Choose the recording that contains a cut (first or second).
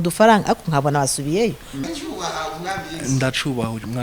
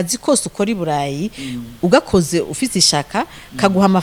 first